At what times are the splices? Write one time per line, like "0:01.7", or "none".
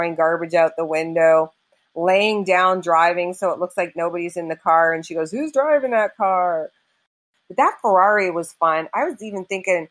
0:07.2

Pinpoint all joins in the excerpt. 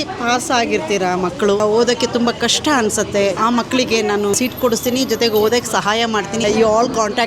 0:01.6
0:03.4
0:04.3
0:06.4

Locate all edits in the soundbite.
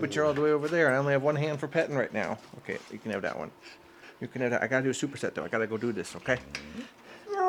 none

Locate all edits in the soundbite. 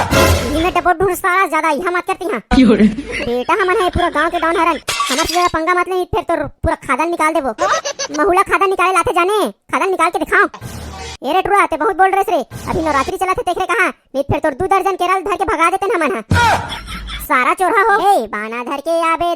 0:18.0

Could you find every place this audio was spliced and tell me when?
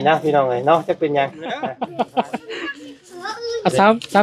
0:01.6

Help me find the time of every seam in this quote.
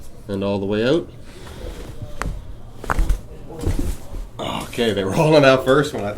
none

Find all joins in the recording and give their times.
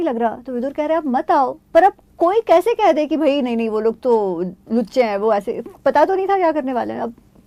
none

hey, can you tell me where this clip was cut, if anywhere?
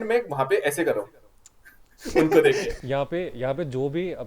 0:02.7

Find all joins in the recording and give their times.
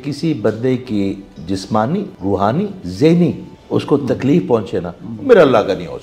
0:02.5
0:03.5

